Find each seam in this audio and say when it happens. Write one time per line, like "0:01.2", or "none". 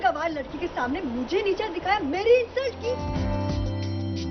0:03.3